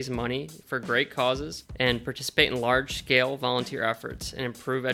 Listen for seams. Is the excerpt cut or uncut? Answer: cut